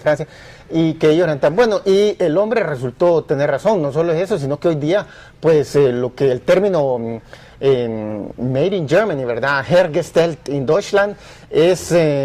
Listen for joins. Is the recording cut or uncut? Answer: cut